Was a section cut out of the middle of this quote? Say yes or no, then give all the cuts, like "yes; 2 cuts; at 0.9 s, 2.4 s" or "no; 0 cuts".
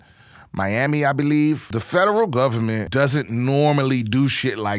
yes; 2 cuts; at 1.7 s, 2.9 s